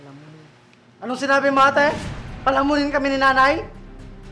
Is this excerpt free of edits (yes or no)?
yes